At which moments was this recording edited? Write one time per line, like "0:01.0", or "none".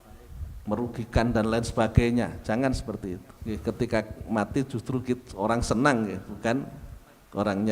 0:03.3